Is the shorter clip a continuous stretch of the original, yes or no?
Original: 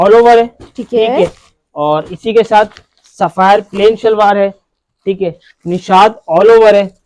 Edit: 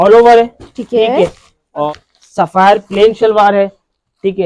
no